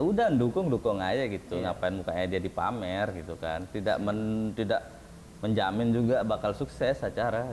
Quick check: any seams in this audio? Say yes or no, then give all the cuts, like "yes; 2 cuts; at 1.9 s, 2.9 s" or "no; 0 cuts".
no; 0 cuts